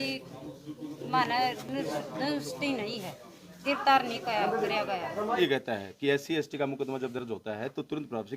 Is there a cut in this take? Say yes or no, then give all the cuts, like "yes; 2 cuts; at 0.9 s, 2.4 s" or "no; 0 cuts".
yes; 1 cut; at 5.4 s